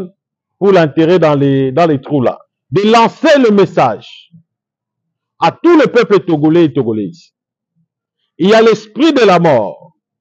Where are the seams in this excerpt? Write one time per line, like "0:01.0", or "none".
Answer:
0:02.5